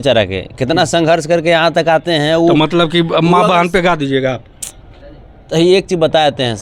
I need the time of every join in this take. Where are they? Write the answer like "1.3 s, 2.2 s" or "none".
none